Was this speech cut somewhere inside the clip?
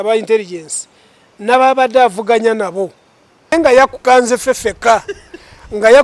yes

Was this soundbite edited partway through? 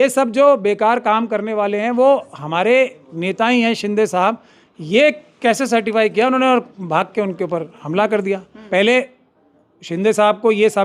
yes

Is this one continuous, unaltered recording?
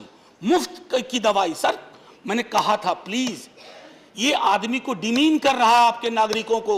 yes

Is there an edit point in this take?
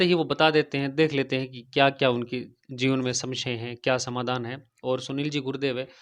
no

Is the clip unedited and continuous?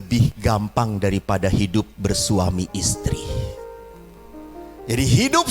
yes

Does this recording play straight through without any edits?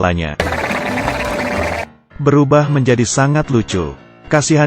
no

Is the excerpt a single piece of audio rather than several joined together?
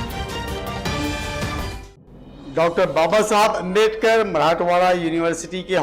yes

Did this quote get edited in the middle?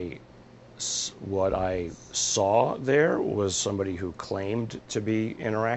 no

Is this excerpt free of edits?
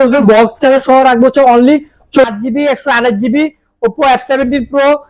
no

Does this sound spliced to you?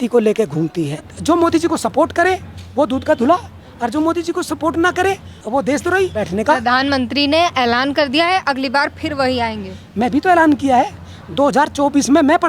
yes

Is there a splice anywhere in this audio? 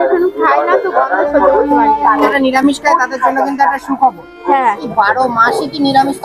yes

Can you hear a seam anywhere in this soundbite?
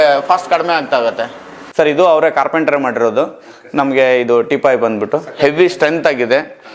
yes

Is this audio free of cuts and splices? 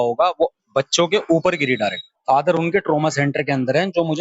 no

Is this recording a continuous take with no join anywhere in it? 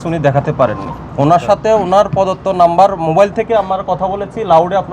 no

